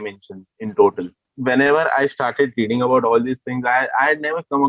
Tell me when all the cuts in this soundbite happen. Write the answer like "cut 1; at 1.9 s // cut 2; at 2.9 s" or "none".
cut 1; at 1.3 s